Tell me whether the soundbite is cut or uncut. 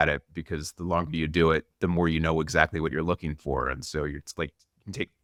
uncut